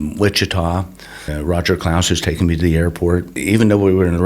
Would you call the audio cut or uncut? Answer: cut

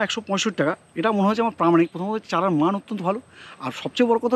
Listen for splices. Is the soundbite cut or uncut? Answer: uncut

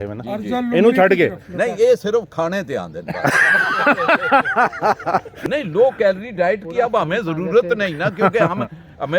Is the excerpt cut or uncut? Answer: cut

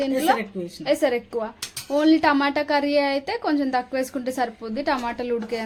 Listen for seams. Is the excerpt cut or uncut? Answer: uncut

